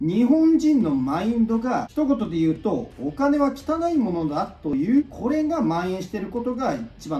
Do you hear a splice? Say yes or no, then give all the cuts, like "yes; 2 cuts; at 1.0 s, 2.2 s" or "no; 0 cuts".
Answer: yes; 2 cuts; at 1.9 s, 4.7 s